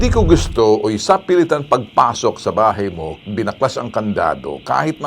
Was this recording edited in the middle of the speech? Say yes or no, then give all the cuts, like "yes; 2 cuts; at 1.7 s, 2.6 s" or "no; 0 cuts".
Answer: no; 0 cuts